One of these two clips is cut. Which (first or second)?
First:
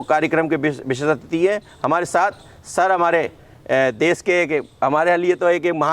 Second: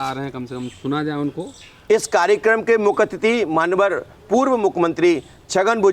second